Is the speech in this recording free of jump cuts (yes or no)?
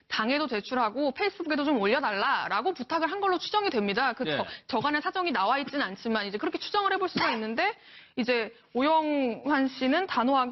no